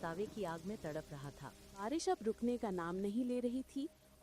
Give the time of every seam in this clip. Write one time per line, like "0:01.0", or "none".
0:01.8